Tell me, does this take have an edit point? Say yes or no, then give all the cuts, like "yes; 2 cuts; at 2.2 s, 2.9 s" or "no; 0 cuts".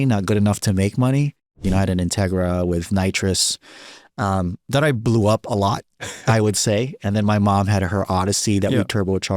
yes; 1 cut; at 1.6 s